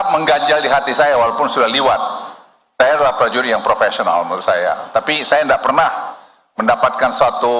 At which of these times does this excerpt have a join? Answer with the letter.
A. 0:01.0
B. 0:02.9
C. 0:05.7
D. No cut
D